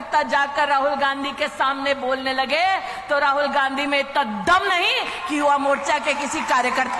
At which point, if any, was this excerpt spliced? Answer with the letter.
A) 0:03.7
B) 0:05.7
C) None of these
C